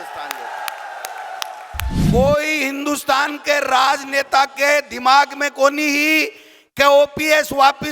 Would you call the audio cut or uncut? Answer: cut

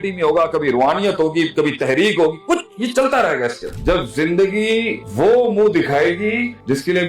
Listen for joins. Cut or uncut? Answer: cut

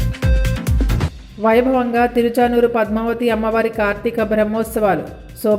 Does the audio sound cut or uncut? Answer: cut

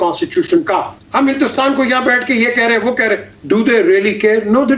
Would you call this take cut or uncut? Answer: cut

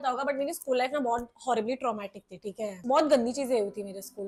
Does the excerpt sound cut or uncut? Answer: uncut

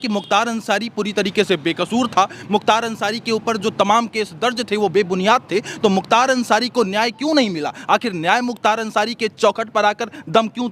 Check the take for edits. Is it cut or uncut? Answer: uncut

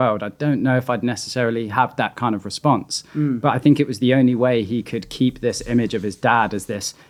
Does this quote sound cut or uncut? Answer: uncut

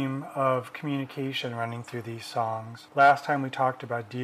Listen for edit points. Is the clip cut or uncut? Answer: uncut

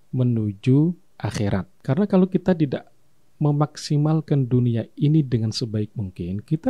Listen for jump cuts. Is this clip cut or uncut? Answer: cut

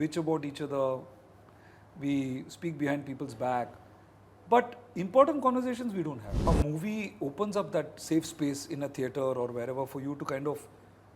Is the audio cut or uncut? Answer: cut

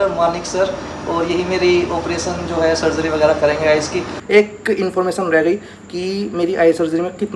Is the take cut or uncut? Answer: cut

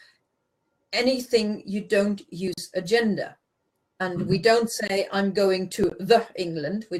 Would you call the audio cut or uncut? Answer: cut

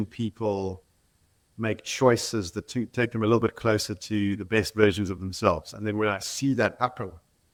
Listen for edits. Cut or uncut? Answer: uncut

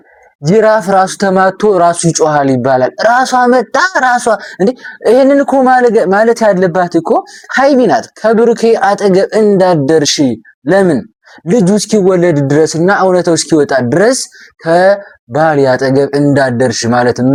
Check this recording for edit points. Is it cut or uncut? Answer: uncut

